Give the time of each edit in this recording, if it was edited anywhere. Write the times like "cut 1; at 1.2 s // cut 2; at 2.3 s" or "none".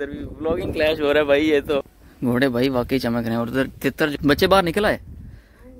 cut 1; at 2.0 s // cut 2; at 4.1 s